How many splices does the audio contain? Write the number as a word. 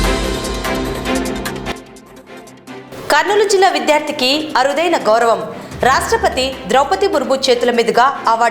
two